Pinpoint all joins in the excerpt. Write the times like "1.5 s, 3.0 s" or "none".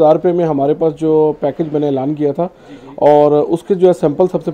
none